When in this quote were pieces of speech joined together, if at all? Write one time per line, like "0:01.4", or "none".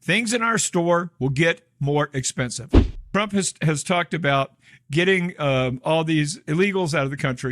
0:02.9